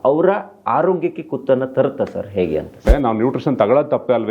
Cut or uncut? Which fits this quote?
cut